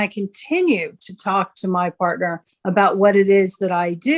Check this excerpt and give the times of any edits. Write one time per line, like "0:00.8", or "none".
0:02.5